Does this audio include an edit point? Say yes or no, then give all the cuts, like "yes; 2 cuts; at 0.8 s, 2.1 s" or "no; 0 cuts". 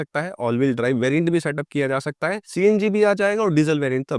no; 0 cuts